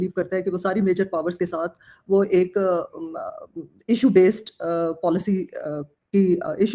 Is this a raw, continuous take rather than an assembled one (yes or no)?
yes